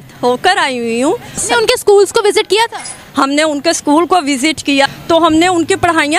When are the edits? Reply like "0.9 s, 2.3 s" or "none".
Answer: 1.4 s, 4.9 s